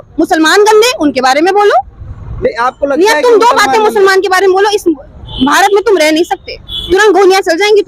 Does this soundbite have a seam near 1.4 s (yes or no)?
no